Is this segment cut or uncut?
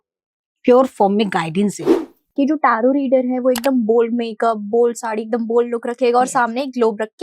cut